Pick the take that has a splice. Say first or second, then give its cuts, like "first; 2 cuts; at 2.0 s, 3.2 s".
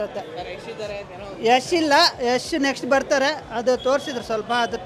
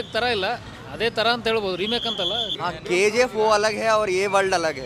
second; 1 cut; at 2.5 s